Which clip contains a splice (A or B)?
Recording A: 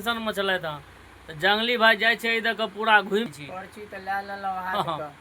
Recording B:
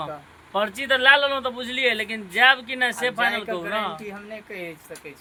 A